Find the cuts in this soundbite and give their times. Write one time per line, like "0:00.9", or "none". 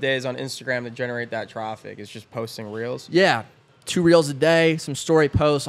none